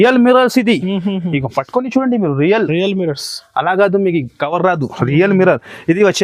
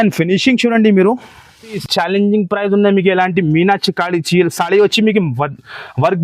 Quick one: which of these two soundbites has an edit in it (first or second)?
second